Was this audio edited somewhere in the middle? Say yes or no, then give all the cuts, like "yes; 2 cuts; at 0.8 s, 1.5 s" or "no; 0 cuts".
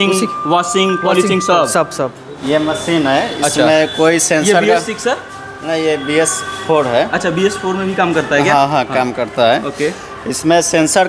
yes; 1 cut; at 2.3 s